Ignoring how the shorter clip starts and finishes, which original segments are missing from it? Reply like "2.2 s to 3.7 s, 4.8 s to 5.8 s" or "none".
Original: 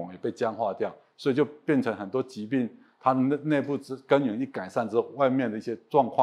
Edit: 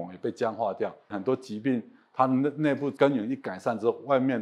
1.1 s to 2.0 s, 3.8 s to 4.0 s